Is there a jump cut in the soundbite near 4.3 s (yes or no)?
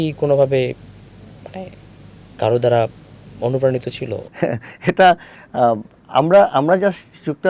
yes